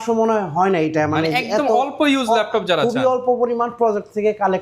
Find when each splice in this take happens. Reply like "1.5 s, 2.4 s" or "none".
none